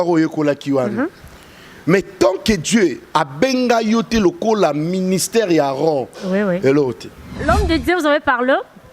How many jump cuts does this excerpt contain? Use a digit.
1